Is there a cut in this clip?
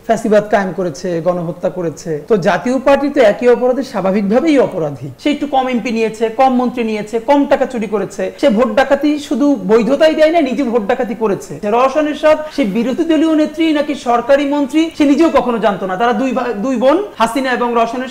yes; 4 cuts; at 2.2 s, 5.1 s, 8.3 s, 11.6 s

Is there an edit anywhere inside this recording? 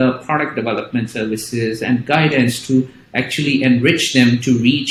no; 0 cuts

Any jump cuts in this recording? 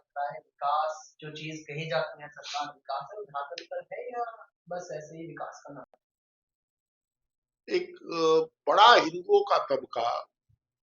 yes; 1 cut; at 6.2 s

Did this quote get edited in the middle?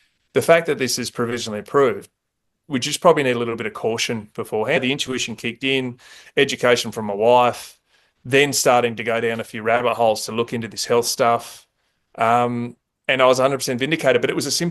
yes; 1 cut; at 4.8 s

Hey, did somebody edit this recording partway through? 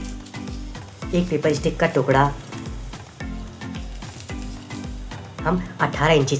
yes; 4 cuts; at 0.9 s, 2.4 s, 3.9 s, 5.4 s

